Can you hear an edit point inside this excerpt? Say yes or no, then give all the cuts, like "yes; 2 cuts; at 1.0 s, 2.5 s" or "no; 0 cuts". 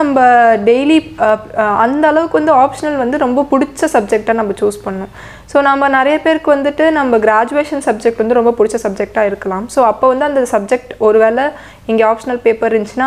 no; 0 cuts